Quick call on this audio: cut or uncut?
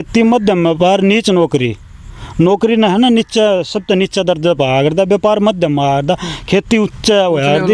uncut